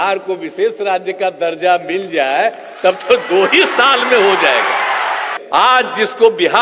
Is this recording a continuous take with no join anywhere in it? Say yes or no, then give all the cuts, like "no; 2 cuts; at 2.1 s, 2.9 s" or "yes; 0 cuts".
no; 1 cut; at 5.3 s